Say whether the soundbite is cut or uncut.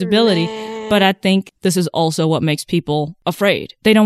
uncut